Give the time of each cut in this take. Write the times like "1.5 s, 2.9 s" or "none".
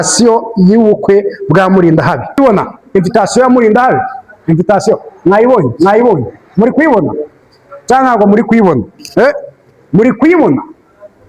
2.4 s